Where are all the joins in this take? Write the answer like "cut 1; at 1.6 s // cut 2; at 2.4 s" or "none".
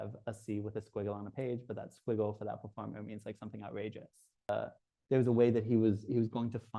cut 1; at 4.5 s